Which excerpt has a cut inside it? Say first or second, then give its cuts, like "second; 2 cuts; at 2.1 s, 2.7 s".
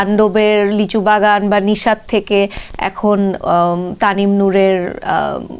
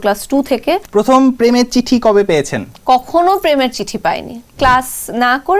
second; 2 cuts; at 0.9 s, 4.6 s